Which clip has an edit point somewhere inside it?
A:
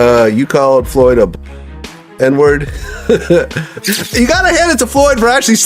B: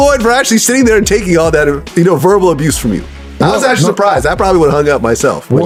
A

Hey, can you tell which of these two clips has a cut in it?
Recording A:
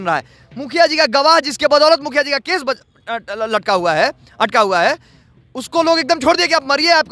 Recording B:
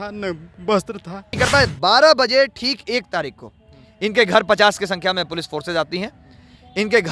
B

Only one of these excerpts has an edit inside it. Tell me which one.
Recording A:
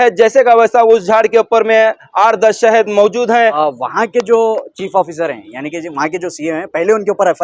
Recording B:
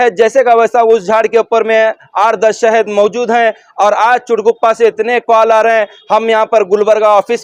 A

